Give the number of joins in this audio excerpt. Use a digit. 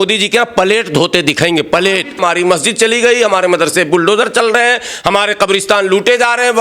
1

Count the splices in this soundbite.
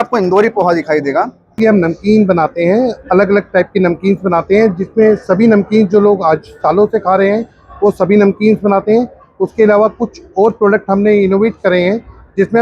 1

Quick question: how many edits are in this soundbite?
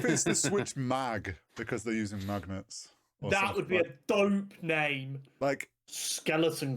1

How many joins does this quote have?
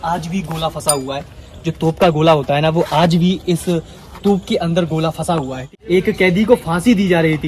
1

